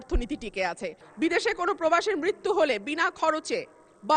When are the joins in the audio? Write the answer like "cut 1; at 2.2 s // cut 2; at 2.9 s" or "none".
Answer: cut 1; at 1.0 s